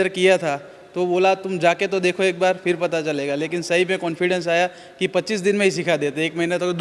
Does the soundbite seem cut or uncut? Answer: uncut